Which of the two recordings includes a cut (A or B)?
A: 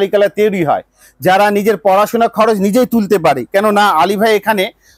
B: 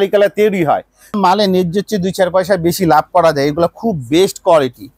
B